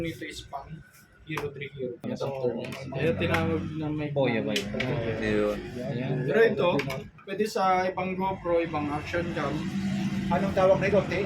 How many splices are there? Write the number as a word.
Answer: one